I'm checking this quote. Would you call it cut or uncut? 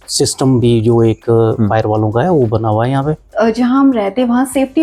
uncut